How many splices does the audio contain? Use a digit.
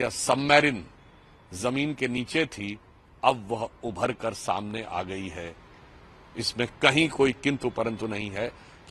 0